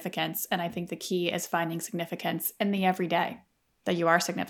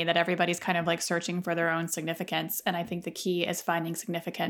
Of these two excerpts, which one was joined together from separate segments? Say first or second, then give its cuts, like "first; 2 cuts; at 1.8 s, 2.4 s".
first; 1 cut; at 3.5 s